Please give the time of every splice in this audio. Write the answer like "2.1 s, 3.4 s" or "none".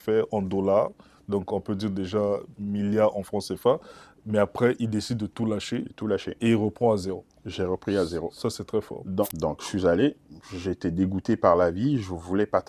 9.2 s